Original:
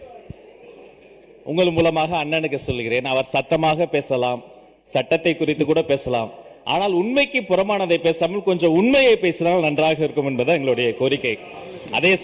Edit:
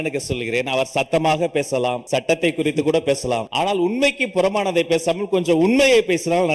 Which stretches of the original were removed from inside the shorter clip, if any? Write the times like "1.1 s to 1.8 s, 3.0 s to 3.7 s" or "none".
4.4 s to 4.8 s, 6.3 s to 6.6 s